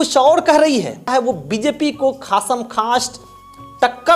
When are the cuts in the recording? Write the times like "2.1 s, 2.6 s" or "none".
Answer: 1.1 s